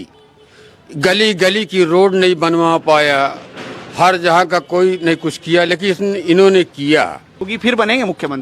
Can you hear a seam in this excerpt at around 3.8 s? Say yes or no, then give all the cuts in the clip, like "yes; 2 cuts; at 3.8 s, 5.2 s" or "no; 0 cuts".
no; 1 cut; at 7.4 s